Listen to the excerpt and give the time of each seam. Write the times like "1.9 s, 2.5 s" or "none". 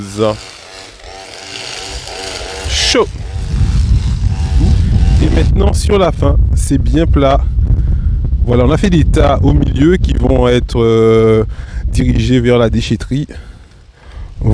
4.7 s